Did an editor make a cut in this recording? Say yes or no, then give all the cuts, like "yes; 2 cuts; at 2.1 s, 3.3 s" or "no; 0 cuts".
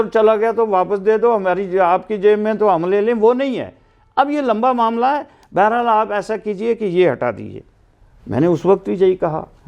no; 0 cuts